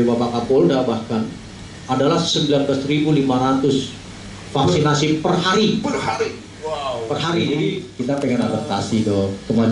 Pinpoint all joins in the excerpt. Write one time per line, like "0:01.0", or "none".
0:07.9